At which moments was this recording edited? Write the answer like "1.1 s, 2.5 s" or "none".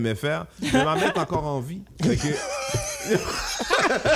none